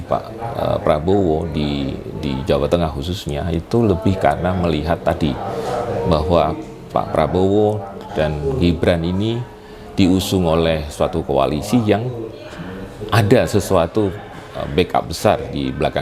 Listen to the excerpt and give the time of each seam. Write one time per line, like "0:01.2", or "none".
none

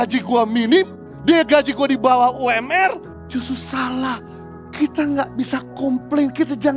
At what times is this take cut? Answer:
0:01.0
0:03.1

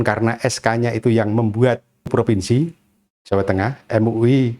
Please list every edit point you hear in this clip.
0:02.1

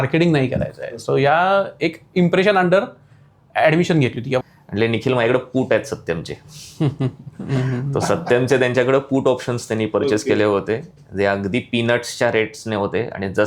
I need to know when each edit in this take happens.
0:04.4

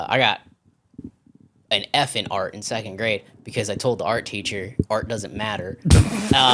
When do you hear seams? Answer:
none

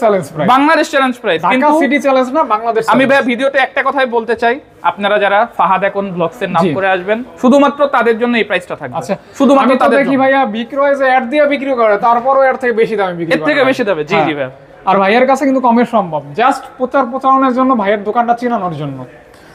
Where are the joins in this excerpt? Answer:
none

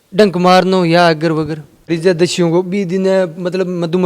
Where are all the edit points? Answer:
0:01.9

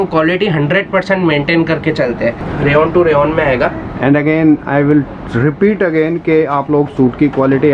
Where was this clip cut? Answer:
0:02.4

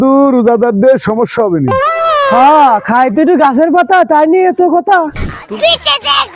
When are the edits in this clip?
0:05.2

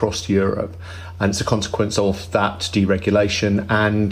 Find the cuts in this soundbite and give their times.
none

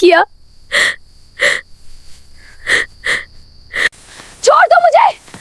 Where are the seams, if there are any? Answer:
0:03.9

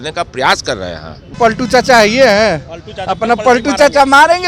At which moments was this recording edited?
0:01.4

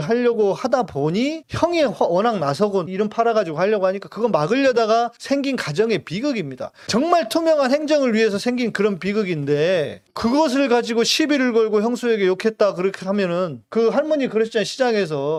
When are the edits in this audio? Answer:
none

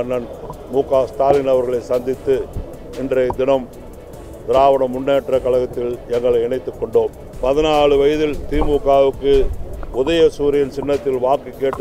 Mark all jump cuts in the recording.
0:07.2

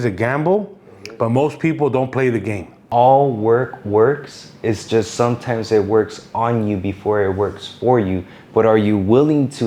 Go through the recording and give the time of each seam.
0:02.7

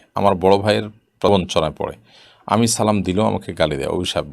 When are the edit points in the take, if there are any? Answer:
0:01.3

